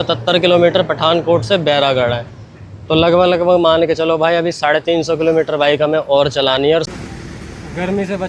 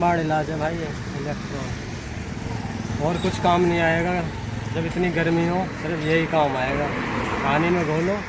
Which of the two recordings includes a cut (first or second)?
first